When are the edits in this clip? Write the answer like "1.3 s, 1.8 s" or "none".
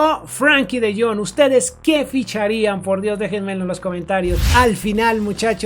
4.4 s